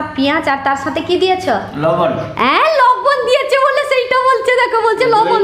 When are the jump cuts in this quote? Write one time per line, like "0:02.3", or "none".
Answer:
none